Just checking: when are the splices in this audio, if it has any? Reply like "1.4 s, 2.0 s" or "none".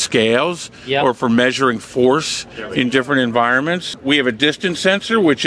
4.0 s